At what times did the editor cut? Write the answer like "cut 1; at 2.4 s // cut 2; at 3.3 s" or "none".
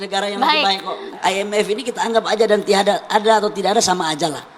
cut 1; at 1.1 s